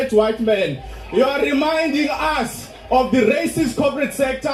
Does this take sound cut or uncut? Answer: uncut